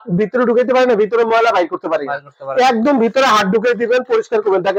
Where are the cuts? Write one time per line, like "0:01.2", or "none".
none